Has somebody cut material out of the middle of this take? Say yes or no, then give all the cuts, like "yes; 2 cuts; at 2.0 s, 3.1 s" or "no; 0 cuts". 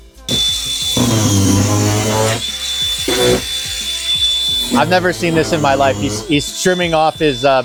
no; 0 cuts